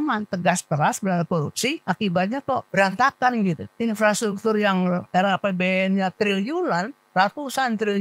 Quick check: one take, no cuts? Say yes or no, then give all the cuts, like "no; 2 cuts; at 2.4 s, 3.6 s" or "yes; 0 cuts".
no; 4 cuts; at 1.8 s, 2.7 s, 3.7 s, 5.0 s